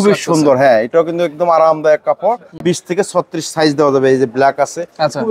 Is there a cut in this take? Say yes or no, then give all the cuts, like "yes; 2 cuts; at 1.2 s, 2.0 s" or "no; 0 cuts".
yes; 1 cut; at 2.6 s